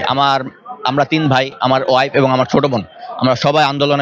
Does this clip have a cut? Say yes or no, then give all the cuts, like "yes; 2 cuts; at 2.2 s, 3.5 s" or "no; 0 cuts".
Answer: no; 0 cuts